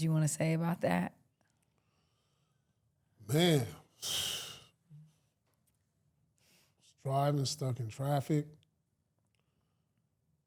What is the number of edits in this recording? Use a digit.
0